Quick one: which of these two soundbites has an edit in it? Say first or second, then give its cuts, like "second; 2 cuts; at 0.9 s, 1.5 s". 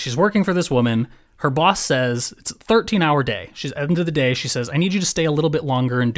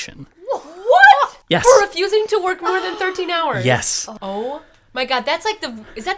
second; 2 cuts; at 1.4 s, 4.0 s